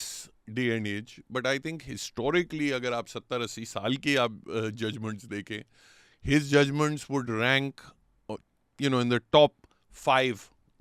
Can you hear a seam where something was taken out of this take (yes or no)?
no